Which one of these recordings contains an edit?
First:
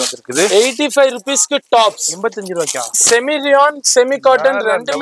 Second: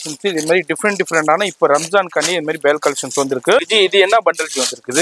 second; 1 cut; at 3.7 s

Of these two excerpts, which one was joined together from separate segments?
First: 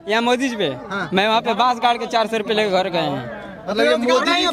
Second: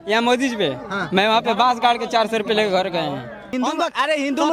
second; 1 cut; at 3.5 s

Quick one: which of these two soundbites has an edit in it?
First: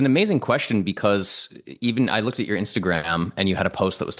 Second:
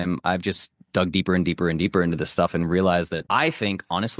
second; 1 cut; at 3.2 s

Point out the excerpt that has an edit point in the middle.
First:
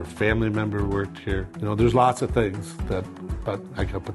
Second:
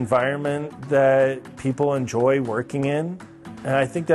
first; 1 cut; at 1.5 s

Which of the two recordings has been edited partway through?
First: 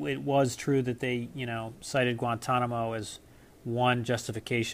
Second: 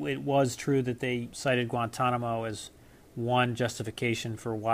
second; 1 cut; at 1.3 s

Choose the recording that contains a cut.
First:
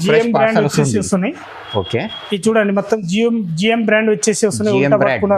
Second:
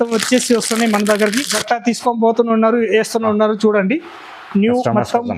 second; 1 cut; at 1.6 s

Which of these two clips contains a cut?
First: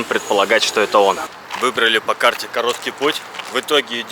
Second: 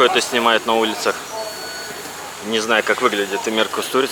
first; 1 cut; at 1.3 s

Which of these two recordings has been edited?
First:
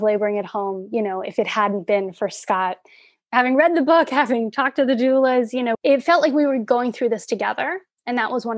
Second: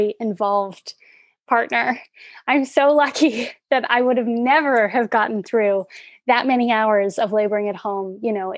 first; 1 cut; at 5.8 s

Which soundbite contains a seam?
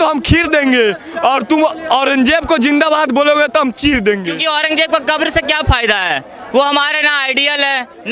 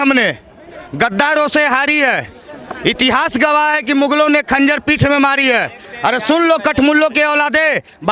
first; 1 cut; at 4.3 s

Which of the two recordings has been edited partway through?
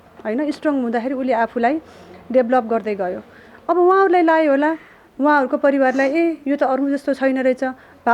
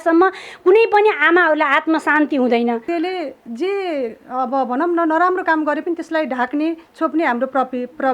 second; 1 cut; at 2.8 s

